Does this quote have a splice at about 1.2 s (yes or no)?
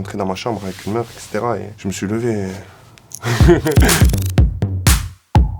no